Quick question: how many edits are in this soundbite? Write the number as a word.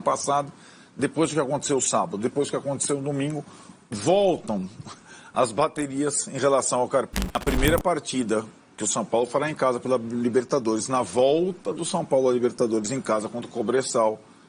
one